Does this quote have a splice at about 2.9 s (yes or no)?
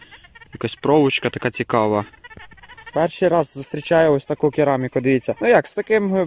yes